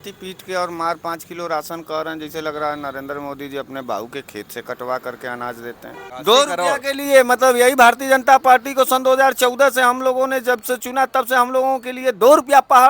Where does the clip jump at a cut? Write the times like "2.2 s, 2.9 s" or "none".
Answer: 6.0 s

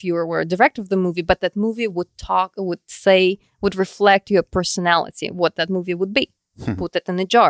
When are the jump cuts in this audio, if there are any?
none

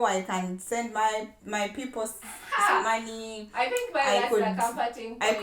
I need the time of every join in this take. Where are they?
none

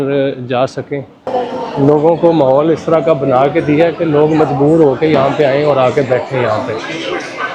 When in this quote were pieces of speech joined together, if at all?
1.3 s

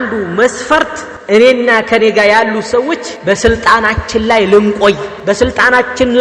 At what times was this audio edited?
1.1 s, 3.1 s, 5.1 s

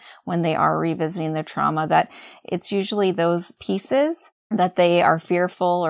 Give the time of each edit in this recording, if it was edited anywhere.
3.6 s, 4.3 s

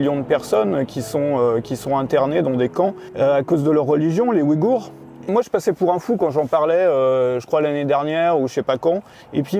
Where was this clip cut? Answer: 5.3 s

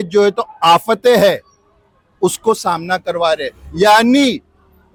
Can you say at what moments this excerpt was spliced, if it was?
none

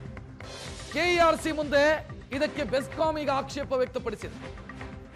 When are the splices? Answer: 0.9 s

